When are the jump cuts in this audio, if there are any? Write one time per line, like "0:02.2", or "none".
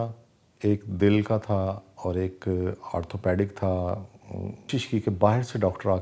0:04.7